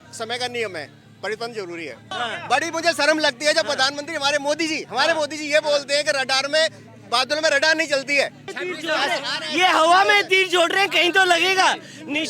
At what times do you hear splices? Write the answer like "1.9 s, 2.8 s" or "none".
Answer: 2.1 s, 8.5 s